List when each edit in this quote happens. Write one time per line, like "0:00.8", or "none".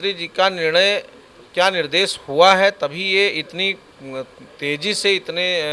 none